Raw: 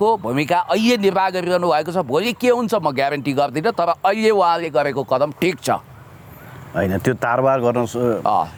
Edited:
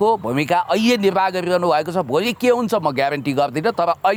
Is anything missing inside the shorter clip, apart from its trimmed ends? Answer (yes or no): no